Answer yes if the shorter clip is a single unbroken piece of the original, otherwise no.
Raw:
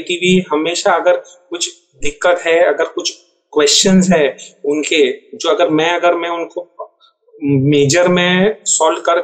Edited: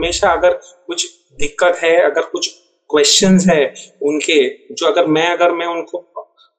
yes